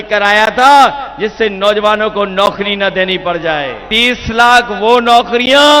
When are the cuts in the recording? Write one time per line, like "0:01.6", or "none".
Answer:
0:03.8